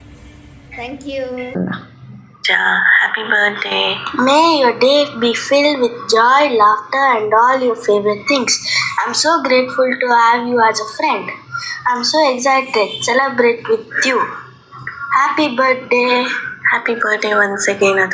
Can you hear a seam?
yes; 1 cut; at 1.6 s

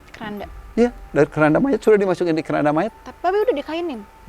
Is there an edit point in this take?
yes; 1 cut; at 2.9 s

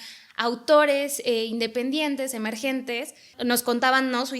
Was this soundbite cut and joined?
yes; 1 cut; at 3.3 s

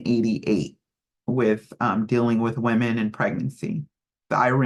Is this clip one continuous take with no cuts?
yes; 0 cuts

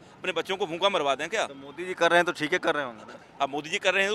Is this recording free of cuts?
yes; 0 cuts

